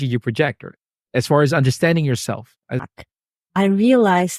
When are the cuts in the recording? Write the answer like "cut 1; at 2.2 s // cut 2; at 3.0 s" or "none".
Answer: cut 1; at 2.9 s